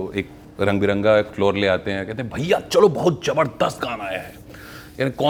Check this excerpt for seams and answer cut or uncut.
uncut